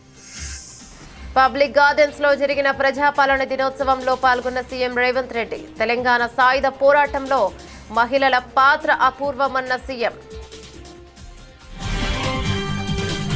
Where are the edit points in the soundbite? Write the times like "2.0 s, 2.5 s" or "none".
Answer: 1.3 s, 10.2 s